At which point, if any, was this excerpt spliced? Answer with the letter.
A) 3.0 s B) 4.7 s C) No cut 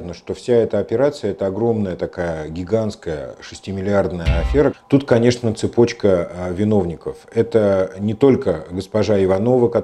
B